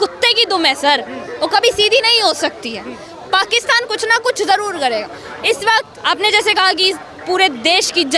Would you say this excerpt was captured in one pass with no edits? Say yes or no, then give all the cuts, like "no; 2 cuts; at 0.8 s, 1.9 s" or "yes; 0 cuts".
yes; 0 cuts